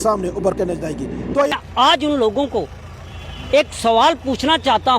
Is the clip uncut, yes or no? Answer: no